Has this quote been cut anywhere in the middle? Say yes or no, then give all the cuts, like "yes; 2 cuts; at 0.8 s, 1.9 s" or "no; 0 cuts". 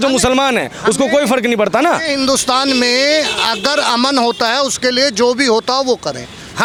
no; 0 cuts